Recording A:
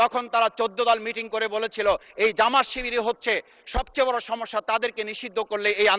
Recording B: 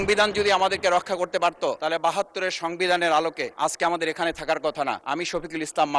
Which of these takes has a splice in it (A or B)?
B